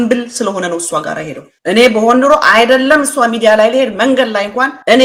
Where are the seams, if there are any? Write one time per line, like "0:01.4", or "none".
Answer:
none